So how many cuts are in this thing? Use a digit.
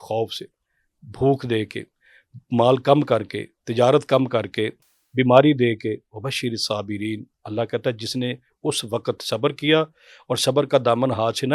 0